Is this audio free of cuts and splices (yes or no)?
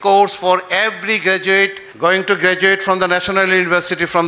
no